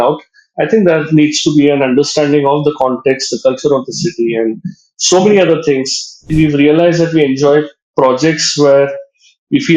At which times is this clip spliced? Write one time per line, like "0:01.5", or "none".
0:06.3